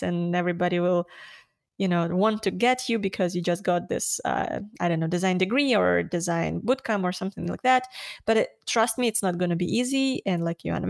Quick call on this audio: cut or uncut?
uncut